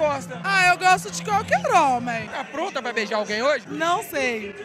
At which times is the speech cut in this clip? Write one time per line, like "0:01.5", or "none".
0:02.3